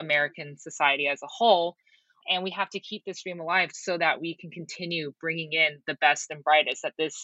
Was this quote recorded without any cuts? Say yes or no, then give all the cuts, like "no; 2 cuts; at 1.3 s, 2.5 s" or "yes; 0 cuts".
yes; 0 cuts